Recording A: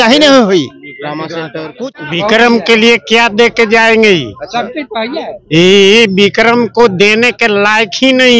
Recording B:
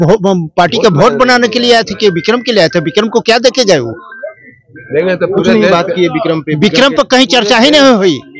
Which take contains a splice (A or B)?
A